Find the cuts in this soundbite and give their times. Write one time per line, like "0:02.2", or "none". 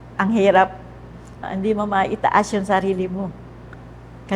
0:01.5